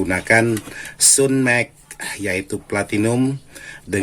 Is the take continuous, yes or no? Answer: yes